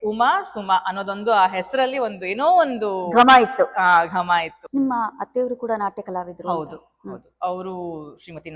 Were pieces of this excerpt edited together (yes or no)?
yes